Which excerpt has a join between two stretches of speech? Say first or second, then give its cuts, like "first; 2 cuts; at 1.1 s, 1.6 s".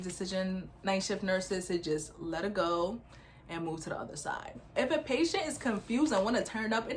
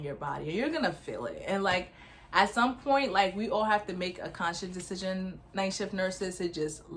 first; 1 cut; at 4.5 s